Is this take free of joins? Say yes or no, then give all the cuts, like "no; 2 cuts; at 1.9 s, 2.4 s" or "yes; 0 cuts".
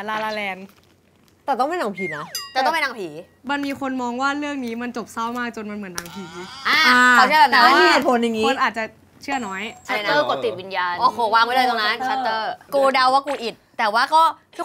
no; 3 cuts; at 1.4 s, 9.8 s, 12.6 s